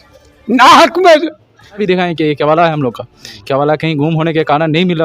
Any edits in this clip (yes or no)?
yes